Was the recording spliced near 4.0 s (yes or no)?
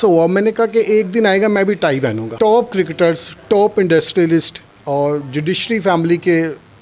no